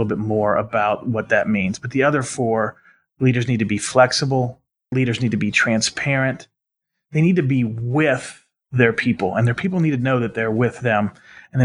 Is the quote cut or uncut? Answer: cut